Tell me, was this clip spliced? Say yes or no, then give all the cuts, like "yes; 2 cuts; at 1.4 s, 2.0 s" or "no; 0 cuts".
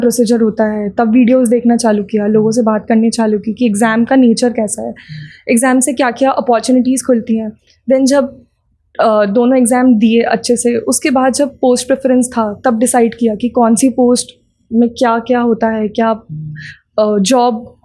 no; 0 cuts